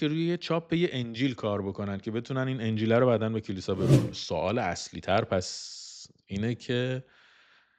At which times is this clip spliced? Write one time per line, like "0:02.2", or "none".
0:04.1